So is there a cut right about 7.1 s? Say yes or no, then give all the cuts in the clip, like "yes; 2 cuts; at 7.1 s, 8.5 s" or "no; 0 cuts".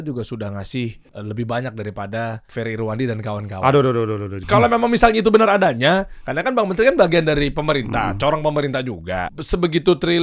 no; 4 cuts; at 1.1 s, 2.4 s, 4.3 s, 9.3 s